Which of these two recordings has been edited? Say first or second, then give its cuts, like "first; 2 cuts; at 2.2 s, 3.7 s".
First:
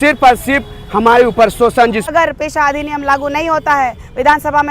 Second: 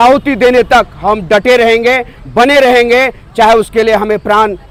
first; 1 cut; at 2.1 s